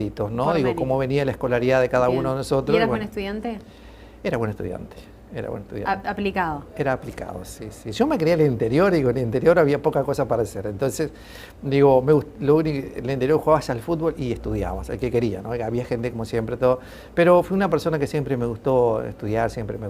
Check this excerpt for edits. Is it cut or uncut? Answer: uncut